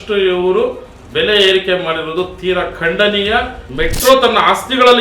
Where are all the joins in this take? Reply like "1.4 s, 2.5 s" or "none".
3.6 s

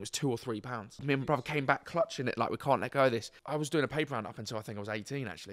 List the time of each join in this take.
1.0 s, 3.4 s

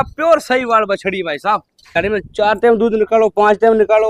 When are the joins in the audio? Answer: 2.0 s

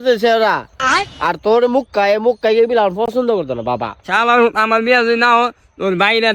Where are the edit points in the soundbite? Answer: 4.0 s

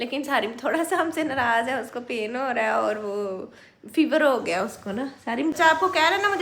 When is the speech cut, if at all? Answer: 5.5 s

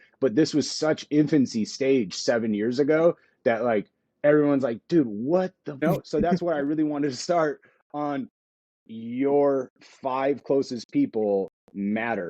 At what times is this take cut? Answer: 5.8 s

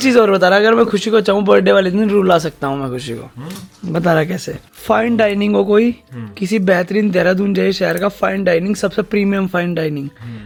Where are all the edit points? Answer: none

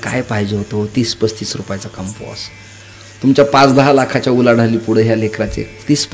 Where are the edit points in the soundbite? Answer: none

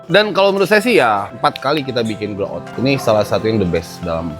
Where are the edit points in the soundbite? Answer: 1.3 s, 2.7 s

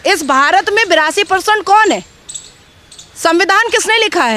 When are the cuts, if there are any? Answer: none

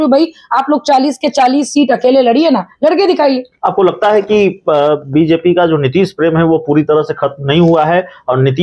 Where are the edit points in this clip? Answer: none

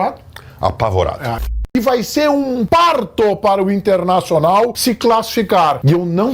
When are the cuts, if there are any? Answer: 1.4 s

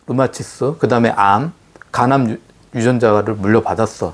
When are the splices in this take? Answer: none

